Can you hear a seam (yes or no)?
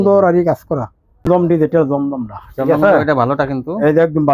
yes